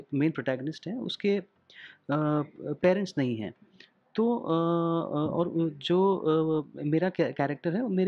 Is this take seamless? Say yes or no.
yes